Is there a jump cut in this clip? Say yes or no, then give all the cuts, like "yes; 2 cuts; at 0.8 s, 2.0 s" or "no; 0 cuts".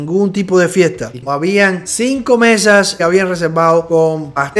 yes; 1 cut; at 1.2 s